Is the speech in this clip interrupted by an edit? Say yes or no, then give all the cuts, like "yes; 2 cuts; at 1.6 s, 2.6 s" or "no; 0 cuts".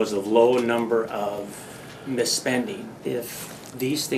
no; 0 cuts